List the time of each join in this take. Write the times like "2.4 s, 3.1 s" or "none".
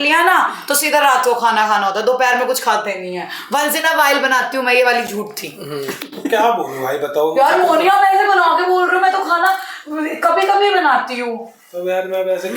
none